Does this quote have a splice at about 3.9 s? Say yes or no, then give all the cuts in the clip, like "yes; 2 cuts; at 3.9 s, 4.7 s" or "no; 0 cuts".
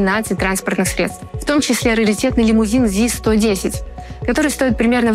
no; 1 cut; at 1.3 s